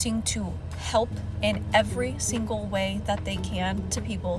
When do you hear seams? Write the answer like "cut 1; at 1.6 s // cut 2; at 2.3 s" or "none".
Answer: none